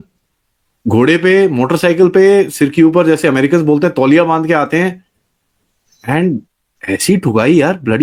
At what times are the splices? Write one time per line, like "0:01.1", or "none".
none